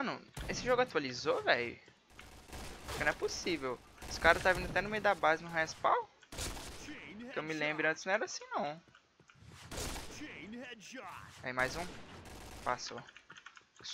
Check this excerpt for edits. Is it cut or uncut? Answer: uncut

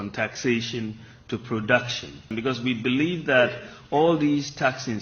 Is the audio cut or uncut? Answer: cut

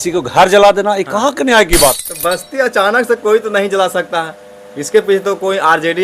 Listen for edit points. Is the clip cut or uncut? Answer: cut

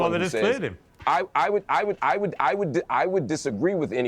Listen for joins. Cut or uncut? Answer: cut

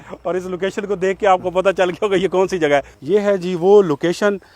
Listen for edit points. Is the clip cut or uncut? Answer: cut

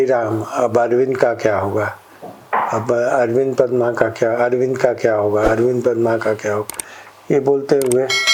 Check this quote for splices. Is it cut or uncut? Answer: uncut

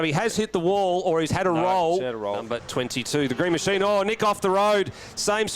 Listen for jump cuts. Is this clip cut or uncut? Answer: cut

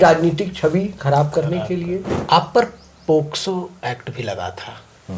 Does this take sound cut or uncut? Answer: cut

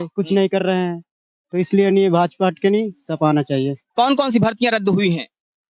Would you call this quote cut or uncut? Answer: cut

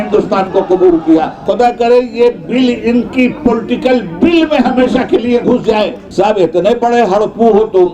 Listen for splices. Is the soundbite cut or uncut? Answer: cut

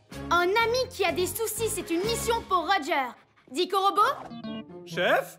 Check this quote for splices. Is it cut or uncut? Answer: uncut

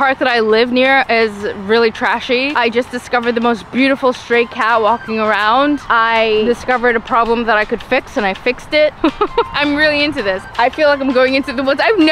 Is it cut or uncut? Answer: cut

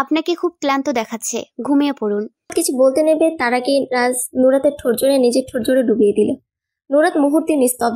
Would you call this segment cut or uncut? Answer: cut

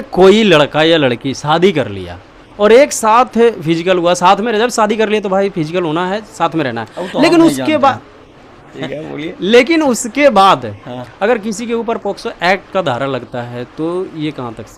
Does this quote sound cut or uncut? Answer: cut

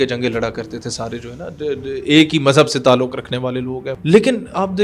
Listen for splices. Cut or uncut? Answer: cut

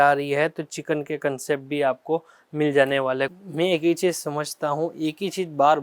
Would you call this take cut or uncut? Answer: cut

